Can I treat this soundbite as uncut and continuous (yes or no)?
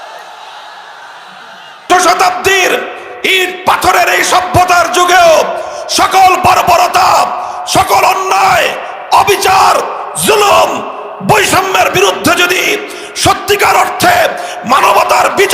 no